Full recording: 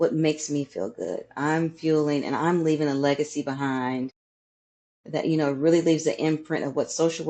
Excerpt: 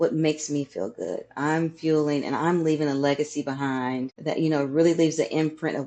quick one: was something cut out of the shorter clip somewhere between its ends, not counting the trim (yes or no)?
yes